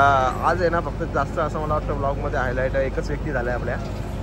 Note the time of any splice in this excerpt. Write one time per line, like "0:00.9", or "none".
none